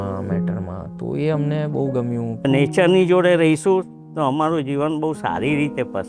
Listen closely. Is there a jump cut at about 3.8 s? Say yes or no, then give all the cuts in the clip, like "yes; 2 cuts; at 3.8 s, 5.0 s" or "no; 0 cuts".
no; 1 cut; at 2.4 s